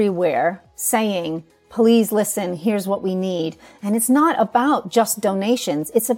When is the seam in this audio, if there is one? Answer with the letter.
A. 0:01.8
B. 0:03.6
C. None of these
C